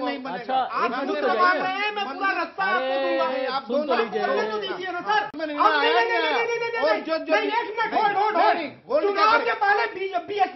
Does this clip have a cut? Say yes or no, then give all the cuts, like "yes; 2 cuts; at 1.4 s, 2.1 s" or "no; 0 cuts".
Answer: yes; 1 cut; at 5.3 s